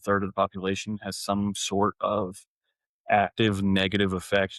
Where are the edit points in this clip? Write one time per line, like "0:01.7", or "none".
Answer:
none